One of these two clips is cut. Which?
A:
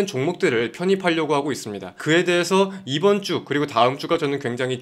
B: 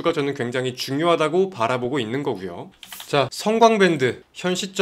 B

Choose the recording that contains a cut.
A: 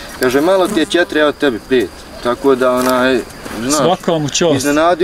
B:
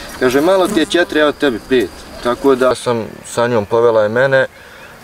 B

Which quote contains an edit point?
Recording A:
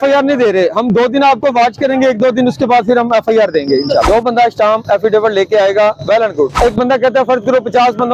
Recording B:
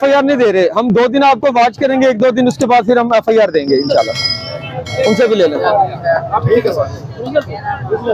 A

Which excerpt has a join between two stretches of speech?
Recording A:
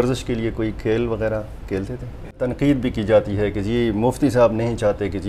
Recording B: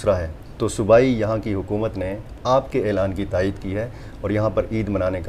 A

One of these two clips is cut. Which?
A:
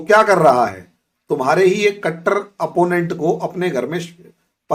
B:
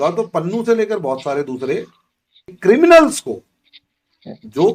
B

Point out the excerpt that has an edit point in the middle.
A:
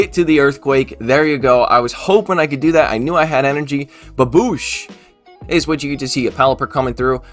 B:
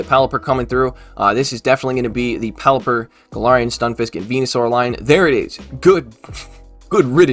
A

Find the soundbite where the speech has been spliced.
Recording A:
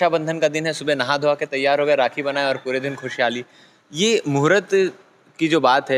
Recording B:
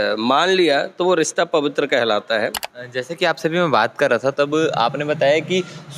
B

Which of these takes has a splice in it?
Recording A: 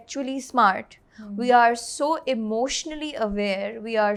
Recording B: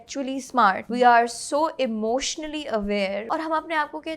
B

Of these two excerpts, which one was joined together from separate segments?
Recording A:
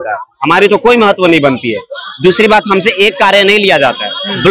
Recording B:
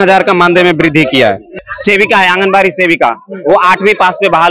B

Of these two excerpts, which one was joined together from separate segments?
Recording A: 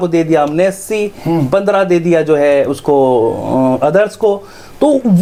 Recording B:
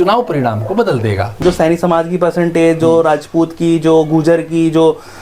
B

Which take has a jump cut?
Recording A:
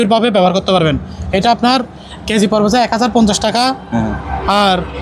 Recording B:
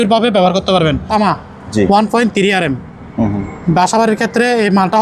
B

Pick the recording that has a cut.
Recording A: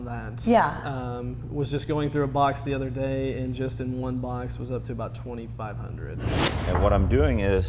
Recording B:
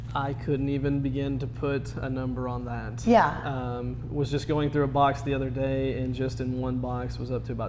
A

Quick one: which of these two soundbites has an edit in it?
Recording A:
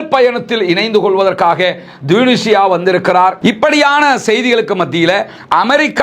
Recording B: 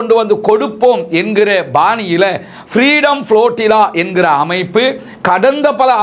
A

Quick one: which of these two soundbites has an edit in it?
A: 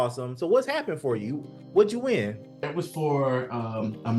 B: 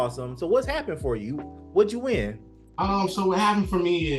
A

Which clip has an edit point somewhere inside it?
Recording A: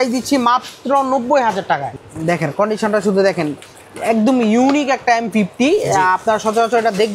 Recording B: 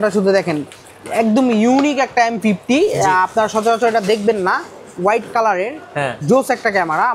A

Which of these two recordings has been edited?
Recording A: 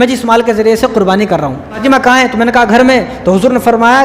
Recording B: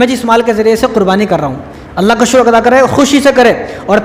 A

